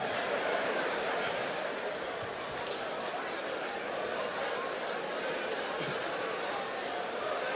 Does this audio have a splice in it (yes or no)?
no